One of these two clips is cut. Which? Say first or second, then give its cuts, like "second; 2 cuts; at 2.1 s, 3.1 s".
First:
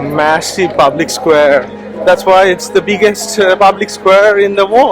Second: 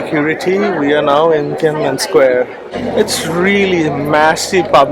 second; 1 cut; at 2.7 s